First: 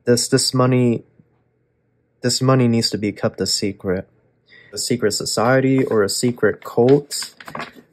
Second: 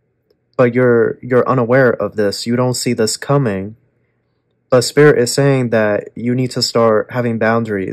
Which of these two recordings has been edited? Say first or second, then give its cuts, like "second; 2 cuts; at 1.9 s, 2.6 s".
first; 1 cut; at 4.8 s